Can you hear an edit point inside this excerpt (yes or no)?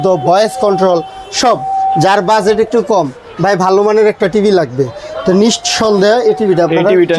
no